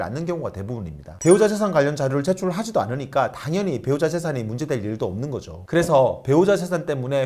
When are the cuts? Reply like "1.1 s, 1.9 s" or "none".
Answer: 5.5 s